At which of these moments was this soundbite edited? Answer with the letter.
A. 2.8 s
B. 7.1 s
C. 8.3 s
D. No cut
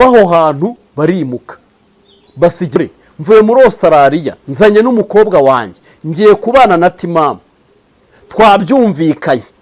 A